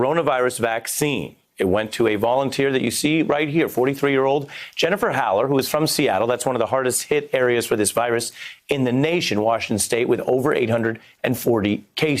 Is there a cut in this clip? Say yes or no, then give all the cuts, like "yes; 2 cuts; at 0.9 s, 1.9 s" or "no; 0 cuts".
no; 0 cuts